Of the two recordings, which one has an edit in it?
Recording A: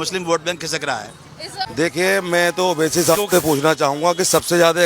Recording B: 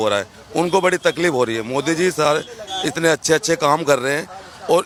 A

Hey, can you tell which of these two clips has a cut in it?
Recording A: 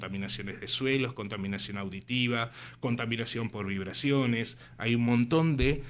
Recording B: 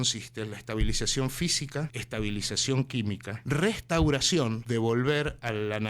B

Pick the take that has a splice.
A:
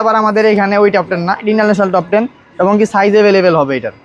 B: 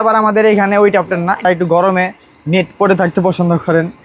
B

